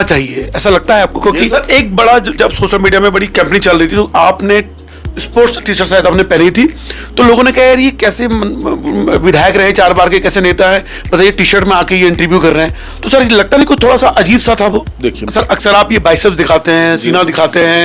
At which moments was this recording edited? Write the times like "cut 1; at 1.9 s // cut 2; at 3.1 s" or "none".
cut 1; at 1.5 s // cut 2; at 15.2 s